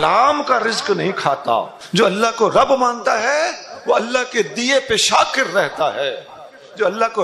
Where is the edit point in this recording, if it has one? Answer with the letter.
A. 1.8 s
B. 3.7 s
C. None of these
A